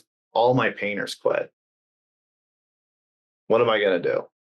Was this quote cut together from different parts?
no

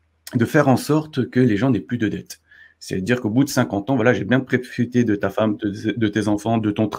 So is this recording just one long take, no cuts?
yes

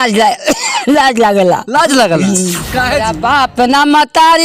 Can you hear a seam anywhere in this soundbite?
yes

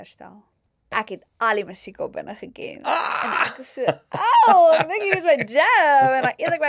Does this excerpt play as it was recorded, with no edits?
no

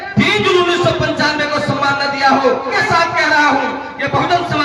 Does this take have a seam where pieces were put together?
yes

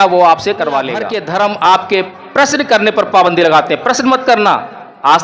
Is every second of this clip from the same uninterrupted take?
no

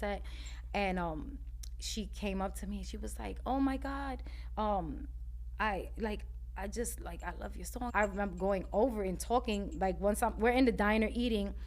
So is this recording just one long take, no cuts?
no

